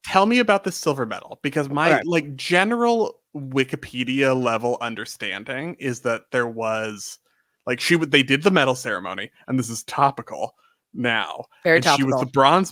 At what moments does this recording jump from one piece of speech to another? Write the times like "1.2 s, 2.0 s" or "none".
none